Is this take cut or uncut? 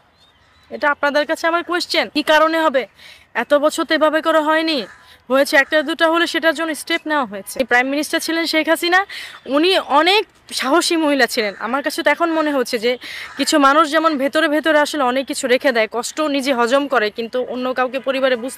cut